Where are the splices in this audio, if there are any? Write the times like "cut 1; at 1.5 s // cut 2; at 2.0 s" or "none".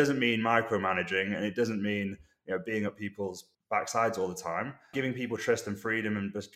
cut 1; at 4.9 s